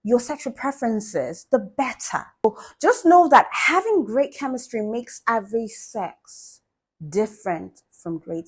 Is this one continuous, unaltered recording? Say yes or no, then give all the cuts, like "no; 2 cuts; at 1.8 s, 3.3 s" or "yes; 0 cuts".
no; 1 cut; at 2.4 s